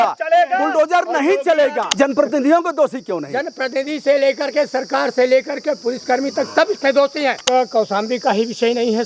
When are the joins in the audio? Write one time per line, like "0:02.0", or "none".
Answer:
0:01.8
0:07.5